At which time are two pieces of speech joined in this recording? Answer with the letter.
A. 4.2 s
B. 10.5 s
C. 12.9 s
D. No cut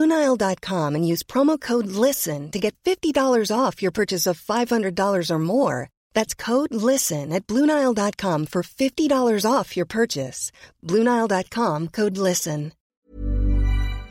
C